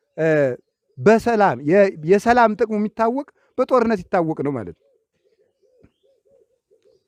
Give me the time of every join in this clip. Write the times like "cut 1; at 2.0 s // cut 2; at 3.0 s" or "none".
none